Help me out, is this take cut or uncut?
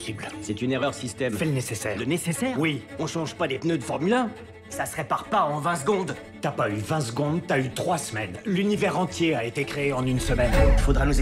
uncut